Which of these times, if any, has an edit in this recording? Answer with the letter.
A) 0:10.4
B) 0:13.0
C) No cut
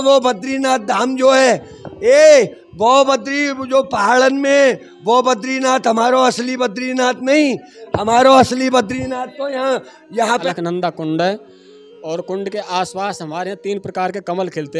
A